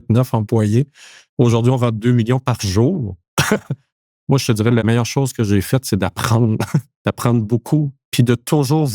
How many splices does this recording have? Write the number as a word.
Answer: three